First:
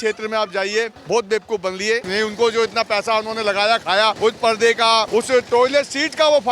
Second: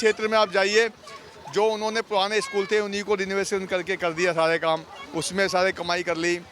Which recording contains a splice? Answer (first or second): first